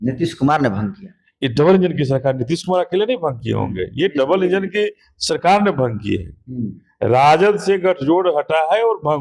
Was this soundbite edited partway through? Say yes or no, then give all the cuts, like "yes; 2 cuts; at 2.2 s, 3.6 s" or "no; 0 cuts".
no; 0 cuts